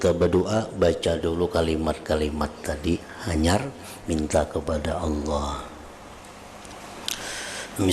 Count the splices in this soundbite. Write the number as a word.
zero